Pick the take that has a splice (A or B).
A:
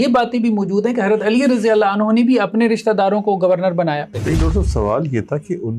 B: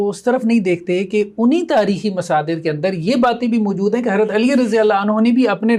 A